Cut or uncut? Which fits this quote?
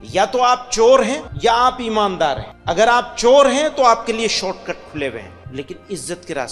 cut